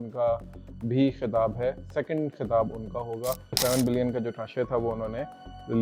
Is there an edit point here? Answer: yes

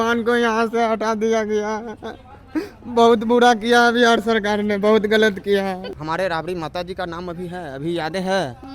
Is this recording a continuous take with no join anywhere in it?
no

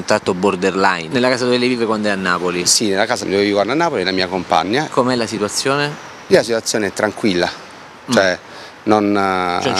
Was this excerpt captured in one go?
no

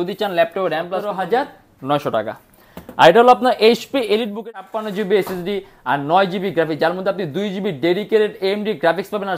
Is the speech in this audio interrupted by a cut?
yes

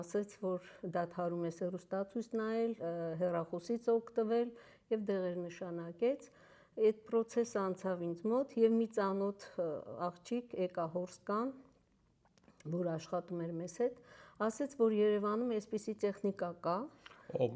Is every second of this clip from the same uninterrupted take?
yes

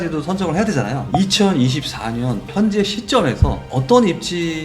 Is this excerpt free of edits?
no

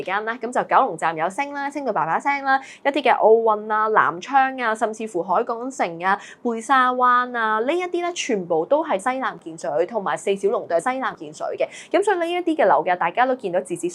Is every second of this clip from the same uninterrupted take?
yes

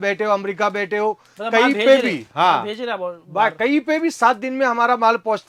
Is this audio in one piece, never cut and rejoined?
yes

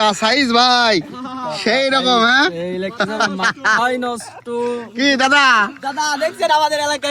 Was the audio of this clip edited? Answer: no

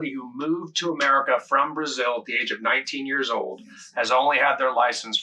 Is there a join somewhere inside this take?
no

